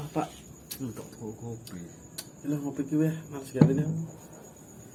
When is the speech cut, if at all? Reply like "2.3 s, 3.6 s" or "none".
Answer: none